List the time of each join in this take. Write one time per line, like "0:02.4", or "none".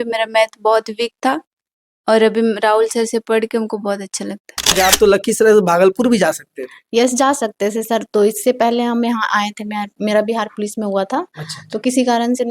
0:04.7